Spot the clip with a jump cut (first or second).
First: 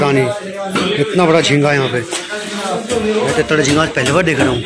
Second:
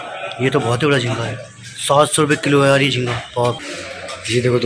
second